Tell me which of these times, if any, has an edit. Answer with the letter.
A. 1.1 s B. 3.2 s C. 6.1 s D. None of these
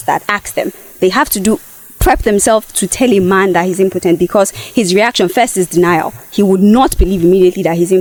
D